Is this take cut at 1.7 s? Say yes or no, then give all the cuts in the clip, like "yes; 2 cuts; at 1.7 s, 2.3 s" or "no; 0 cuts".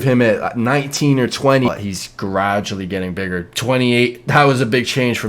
yes; 1 cut; at 1.7 s